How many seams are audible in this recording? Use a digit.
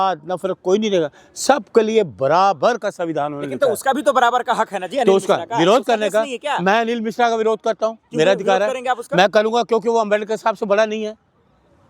0